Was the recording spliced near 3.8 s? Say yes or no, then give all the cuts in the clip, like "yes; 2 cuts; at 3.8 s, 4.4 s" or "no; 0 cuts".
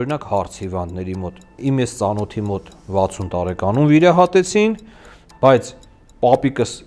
no; 1 cut; at 1.5 s